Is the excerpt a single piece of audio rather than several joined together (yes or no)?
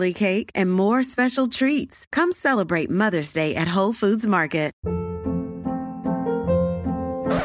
no